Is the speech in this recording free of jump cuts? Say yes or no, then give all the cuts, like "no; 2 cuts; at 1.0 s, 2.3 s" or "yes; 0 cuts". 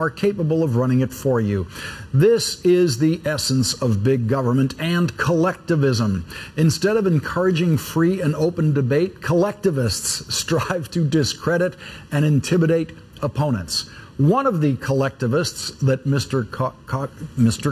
no; 1 cut; at 15.6 s